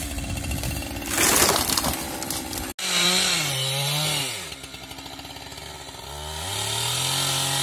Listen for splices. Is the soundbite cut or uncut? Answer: uncut